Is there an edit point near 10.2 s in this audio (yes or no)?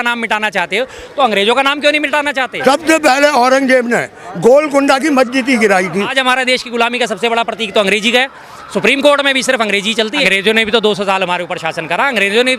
yes